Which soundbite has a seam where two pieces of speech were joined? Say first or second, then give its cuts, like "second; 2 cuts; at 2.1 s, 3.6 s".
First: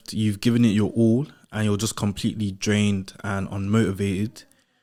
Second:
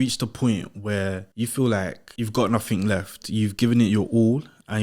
second; 2 cuts; at 1.3 s, 2.0 s